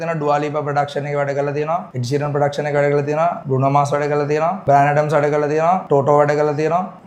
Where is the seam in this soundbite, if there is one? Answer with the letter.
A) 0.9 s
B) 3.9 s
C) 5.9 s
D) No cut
D